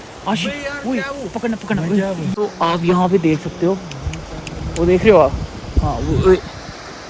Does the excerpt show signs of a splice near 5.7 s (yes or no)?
no